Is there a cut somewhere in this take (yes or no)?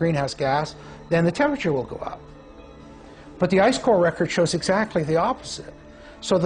no